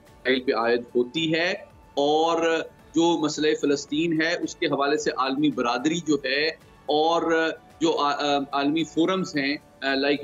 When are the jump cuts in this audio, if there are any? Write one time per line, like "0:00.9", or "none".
none